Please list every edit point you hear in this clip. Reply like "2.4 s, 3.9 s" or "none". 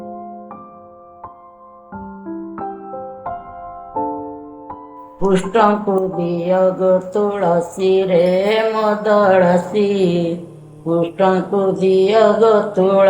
5.0 s